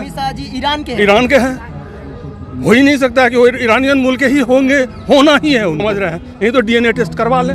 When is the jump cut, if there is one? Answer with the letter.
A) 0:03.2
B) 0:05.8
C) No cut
B